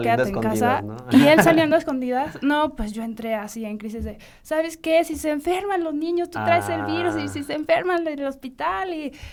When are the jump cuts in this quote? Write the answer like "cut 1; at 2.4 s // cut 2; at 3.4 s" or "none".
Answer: none